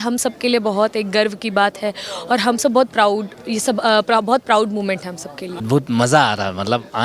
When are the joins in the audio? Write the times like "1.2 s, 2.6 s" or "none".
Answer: 5.6 s